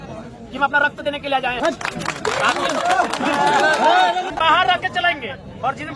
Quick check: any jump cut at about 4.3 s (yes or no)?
yes